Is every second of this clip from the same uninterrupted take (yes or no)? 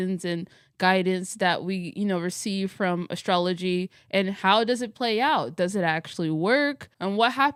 yes